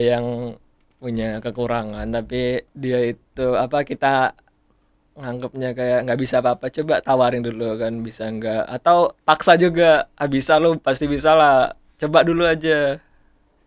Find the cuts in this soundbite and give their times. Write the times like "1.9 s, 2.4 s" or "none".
2.7 s